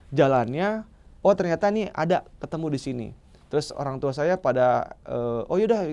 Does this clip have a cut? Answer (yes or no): no